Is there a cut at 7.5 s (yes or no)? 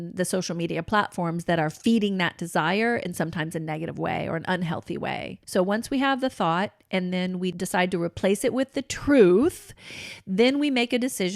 yes